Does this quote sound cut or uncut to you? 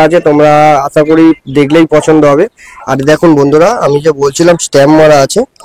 uncut